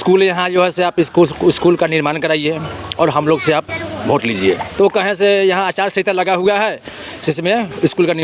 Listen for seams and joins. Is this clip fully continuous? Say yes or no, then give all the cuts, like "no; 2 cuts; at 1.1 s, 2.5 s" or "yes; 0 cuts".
no; 1 cut; at 4.7 s